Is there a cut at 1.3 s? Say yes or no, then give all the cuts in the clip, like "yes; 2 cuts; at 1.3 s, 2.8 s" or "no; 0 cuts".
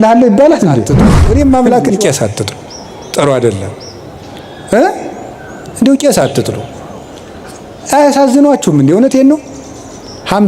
yes; 1 cut; at 1.3 s